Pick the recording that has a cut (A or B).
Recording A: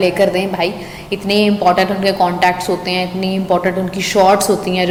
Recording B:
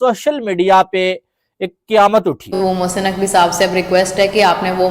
B